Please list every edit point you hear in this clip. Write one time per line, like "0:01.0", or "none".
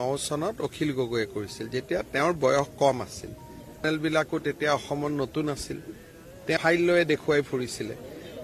0:03.8
0:06.6